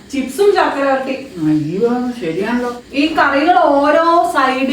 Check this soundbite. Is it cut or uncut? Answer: cut